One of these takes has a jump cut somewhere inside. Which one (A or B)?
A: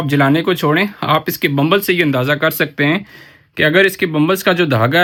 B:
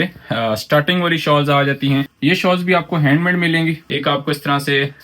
B